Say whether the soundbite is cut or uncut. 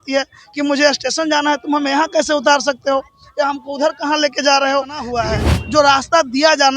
cut